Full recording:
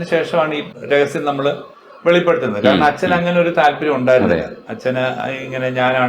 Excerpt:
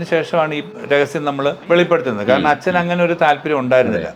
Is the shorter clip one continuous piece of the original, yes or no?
no